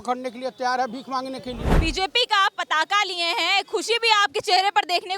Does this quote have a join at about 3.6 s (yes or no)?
no